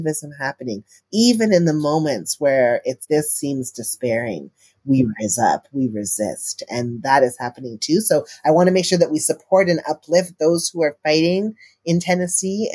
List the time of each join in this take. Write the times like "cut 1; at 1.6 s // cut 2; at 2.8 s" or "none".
cut 1; at 1.0 s